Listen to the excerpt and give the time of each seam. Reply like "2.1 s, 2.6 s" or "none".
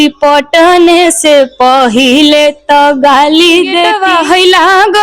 3.9 s